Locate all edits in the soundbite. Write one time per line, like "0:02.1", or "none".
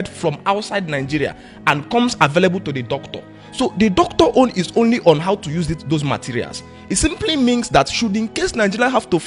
none